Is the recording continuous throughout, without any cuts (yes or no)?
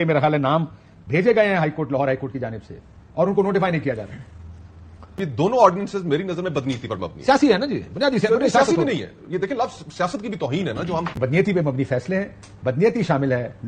no